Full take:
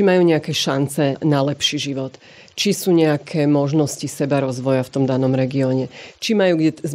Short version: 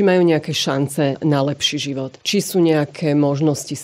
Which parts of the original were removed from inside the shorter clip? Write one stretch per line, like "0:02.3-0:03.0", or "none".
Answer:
0:02.1-0:02.5

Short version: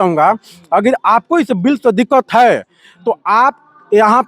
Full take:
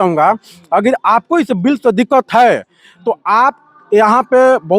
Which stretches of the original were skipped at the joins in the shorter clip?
none

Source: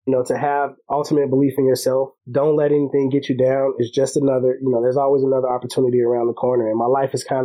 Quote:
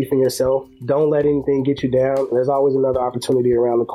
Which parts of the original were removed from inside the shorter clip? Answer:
0:03.8-0:04.8

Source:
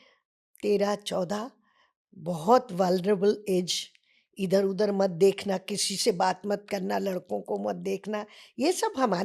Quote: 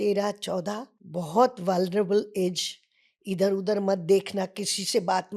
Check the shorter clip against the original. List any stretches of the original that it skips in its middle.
0:01.6-0:02.1

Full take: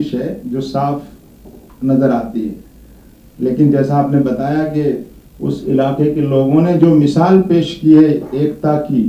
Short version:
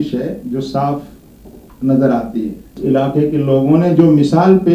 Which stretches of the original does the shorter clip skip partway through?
0:02.8-0:05.6

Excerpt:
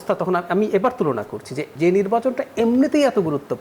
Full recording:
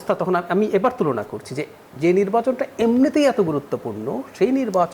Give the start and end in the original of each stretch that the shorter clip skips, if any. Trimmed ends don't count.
0:01.6-0:01.8

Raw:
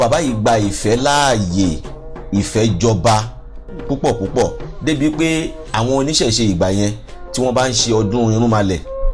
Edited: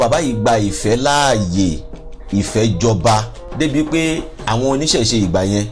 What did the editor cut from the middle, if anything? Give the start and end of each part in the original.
0:03.4-0:04.7

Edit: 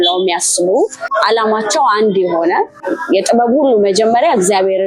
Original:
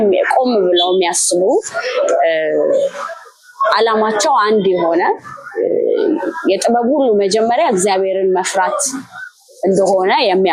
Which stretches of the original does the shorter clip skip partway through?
0:01.7-0:03.5
0:05.4-0:06.3

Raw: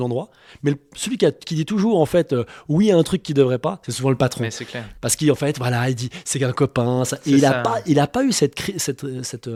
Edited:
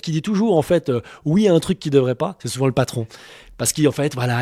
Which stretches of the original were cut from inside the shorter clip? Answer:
none

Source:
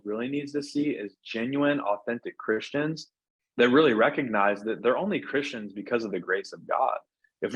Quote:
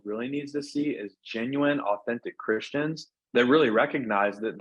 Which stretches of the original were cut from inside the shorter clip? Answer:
0:03.1-0:03.4

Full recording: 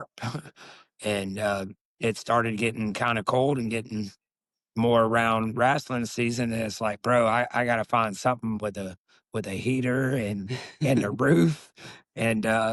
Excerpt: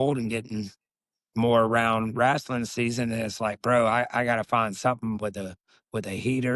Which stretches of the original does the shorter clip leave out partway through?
none

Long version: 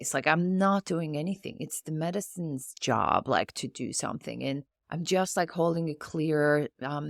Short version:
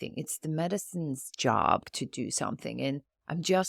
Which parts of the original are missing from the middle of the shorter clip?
0:03.3-0:03.5

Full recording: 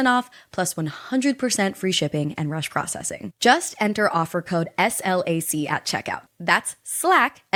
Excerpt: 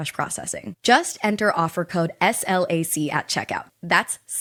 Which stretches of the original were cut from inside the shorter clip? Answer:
none

